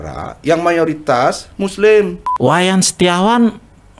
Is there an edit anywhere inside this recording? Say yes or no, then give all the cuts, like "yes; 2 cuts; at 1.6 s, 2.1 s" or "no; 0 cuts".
yes; 1 cut; at 2.2 s